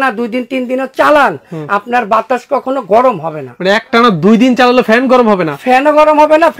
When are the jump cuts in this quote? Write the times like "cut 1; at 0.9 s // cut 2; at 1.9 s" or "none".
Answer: none